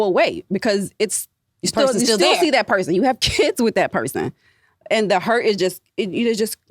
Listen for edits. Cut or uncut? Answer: uncut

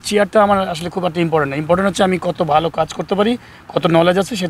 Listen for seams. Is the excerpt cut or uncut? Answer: uncut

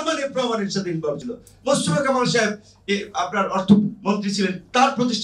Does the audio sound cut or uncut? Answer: uncut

